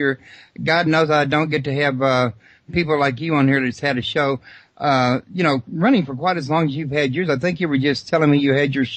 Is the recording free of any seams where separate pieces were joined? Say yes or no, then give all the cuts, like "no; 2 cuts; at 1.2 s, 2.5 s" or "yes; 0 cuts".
yes; 0 cuts